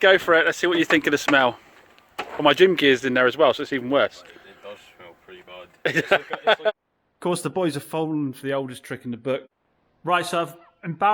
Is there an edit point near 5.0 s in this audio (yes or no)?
no